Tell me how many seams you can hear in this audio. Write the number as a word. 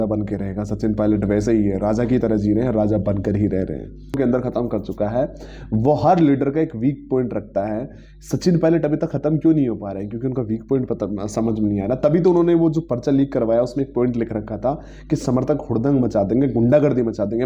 one